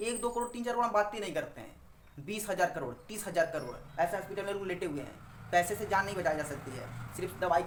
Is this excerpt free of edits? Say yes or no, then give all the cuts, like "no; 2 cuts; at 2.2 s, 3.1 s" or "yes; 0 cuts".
yes; 0 cuts